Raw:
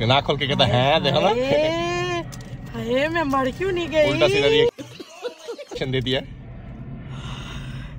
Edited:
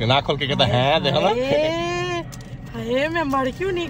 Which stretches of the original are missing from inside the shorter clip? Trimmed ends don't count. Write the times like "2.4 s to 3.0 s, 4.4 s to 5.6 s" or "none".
none